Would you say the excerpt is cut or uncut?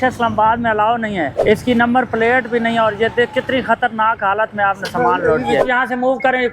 cut